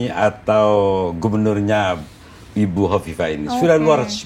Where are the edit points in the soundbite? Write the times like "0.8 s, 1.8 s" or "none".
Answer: none